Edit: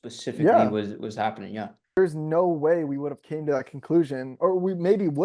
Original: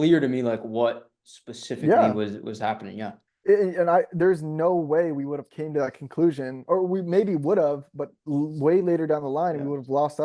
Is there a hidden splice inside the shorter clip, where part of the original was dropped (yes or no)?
yes